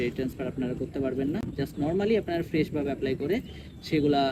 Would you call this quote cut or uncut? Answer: uncut